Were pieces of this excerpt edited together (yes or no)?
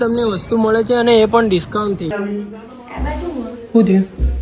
yes